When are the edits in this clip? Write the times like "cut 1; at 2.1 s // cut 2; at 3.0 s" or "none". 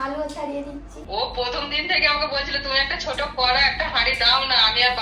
cut 1; at 1.0 s